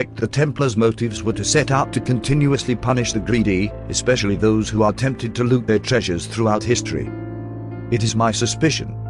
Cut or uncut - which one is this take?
uncut